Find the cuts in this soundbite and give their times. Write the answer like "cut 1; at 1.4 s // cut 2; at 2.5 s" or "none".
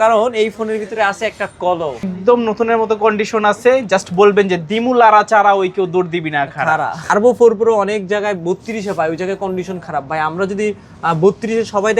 cut 1; at 2.1 s // cut 2; at 7.1 s

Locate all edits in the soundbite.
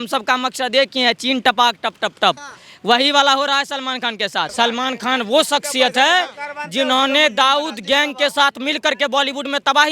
cut 1; at 4.5 s

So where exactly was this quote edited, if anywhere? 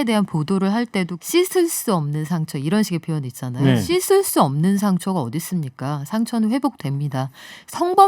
cut 1; at 1.2 s // cut 2; at 3.8 s

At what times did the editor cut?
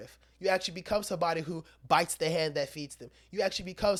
none

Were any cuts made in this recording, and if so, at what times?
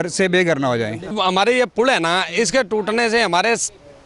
cut 1; at 1.1 s

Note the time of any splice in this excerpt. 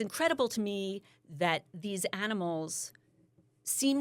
none

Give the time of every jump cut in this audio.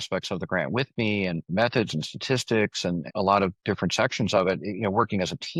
none

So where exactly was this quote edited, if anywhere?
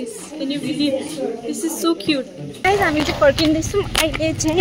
cut 1; at 2.6 s

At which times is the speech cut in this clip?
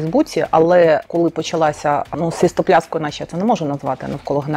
cut 1; at 1.0 s // cut 2; at 2.1 s

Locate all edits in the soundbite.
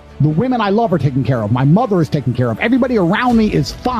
none

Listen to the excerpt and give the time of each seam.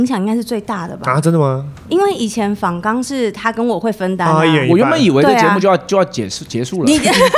none

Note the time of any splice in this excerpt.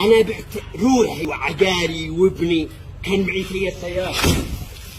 cut 1; at 1.2 s

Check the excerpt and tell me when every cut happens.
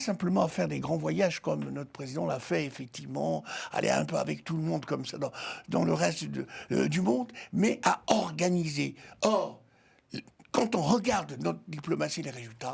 none

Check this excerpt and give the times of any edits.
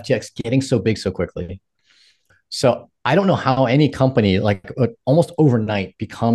none

